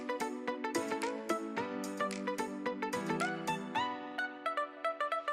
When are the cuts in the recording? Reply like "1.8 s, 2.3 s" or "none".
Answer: none